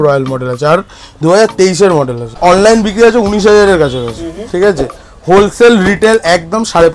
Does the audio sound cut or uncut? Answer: cut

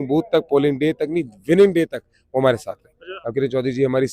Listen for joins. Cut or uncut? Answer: cut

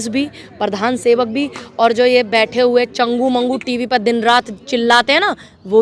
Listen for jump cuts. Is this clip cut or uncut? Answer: uncut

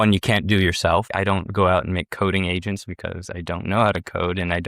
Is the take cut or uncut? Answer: cut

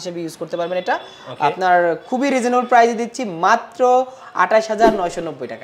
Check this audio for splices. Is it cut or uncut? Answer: uncut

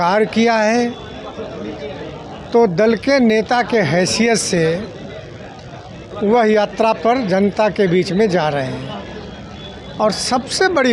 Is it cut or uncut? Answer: uncut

